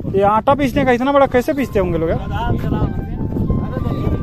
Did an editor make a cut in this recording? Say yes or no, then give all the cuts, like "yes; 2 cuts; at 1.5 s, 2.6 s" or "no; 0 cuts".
no; 0 cuts